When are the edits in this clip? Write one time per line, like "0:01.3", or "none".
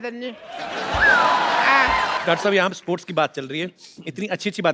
0:02.2